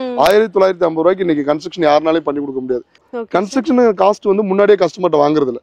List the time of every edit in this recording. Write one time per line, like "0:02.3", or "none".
0:03.0